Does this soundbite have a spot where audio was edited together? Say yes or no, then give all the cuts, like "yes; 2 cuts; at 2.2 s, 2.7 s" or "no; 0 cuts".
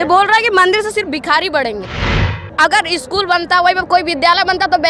yes; 1 cut; at 2.3 s